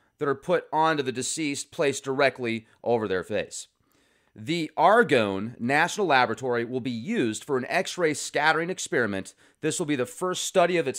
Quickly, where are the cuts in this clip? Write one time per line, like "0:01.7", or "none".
0:01.4